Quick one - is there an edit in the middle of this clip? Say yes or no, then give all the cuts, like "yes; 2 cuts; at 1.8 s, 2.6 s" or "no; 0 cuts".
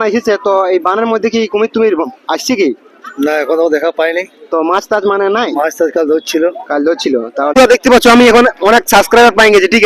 yes; 1 cut; at 7.6 s